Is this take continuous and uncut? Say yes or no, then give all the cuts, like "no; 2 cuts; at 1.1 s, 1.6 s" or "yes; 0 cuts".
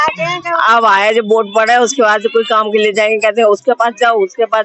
yes; 0 cuts